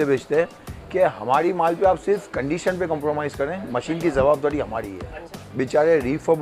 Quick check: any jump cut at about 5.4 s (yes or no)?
yes